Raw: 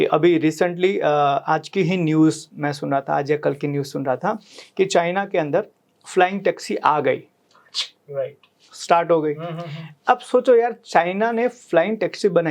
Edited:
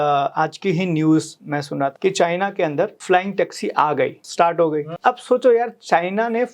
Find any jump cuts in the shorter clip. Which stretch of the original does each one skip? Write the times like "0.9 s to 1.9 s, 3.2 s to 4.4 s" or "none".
3.1 s to 4.7 s, 5.7 s to 6.0 s, 7.3 s to 8.7 s, 9.4 s to 9.9 s